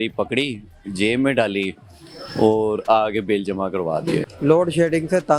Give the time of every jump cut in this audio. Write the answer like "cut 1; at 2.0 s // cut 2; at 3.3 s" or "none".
cut 1; at 4.3 s